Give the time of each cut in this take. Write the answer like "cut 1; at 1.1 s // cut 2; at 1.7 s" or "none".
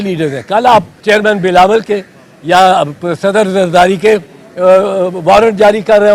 cut 1; at 0.9 s